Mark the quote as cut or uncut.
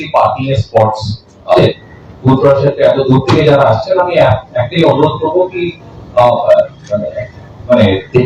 cut